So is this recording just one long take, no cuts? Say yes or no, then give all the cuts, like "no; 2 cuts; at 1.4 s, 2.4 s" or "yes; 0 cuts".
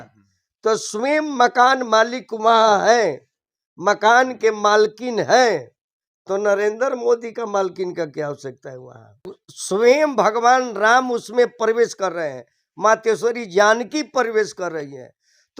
no; 1 cut; at 9.4 s